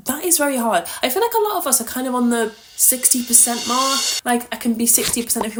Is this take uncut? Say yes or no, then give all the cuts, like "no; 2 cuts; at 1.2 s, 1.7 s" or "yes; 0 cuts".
yes; 0 cuts